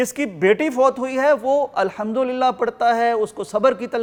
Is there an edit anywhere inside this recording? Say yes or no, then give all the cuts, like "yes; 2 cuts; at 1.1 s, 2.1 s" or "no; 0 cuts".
no; 0 cuts